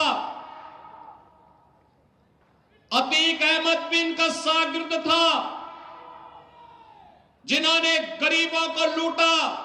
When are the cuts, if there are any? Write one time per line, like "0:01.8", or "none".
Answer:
none